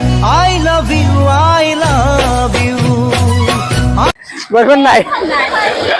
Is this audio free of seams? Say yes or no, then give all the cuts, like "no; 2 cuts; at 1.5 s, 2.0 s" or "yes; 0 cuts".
yes; 0 cuts